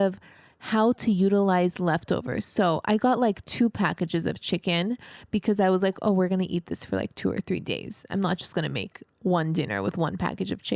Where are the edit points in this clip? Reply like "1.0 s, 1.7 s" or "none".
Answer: none

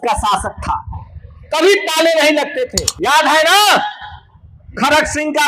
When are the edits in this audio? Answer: 2.8 s

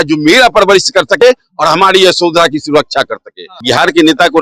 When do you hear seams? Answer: 3.5 s

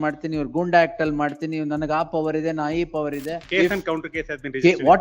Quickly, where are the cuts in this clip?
3.4 s

